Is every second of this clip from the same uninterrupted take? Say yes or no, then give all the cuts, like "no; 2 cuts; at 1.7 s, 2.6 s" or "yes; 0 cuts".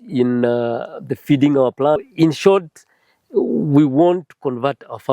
no; 1 cut; at 2.0 s